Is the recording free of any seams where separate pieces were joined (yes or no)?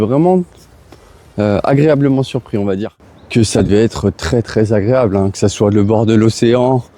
no